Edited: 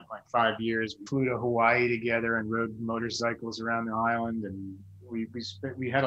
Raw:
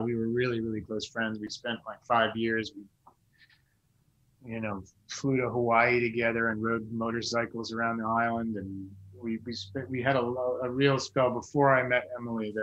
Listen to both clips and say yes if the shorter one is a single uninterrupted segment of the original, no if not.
no